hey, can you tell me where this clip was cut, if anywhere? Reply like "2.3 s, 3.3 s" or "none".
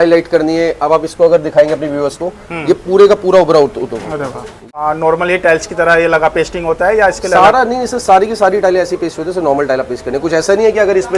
4.8 s